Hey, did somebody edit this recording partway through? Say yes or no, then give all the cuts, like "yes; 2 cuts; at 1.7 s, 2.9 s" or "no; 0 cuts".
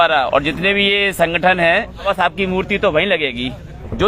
yes; 1 cut; at 2.0 s